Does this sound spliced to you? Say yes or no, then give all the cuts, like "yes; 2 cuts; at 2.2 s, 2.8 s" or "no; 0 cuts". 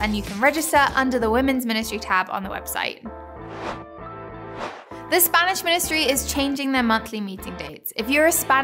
no; 0 cuts